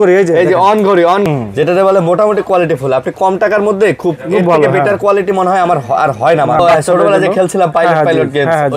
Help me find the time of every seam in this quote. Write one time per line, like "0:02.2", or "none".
0:01.3
0:06.6